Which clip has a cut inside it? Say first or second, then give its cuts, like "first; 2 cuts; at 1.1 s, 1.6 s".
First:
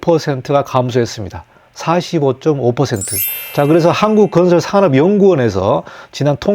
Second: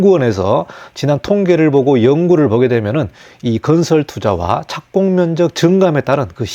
first; 1 cut; at 3.4 s